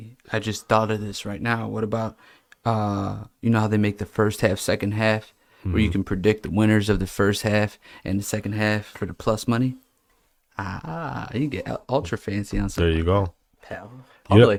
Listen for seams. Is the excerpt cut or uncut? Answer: uncut